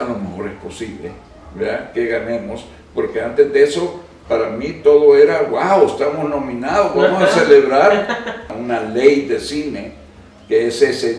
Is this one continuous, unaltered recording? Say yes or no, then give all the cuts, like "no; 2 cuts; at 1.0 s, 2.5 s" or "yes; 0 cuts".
no; 1 cut; at 8.5 s